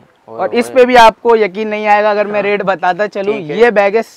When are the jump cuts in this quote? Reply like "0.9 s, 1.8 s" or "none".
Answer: none